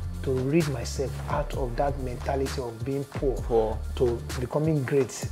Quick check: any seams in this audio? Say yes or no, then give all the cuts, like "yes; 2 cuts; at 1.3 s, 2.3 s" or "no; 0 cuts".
no; 0 cuts